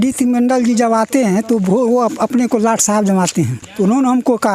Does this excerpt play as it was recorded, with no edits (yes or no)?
no